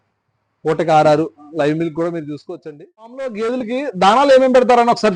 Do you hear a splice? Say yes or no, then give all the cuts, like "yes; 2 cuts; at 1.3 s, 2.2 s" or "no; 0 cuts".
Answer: yes; 1 cut; at 3.3 s